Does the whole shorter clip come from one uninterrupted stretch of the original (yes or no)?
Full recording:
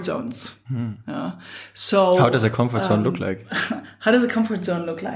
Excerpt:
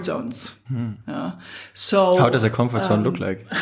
yes